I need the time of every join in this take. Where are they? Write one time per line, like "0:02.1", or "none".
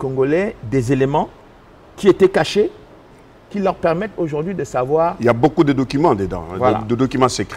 none